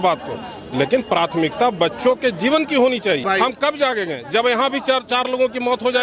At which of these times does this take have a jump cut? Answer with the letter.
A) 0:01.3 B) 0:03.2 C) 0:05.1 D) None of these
B